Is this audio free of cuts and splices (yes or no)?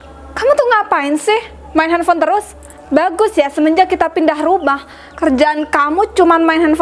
yes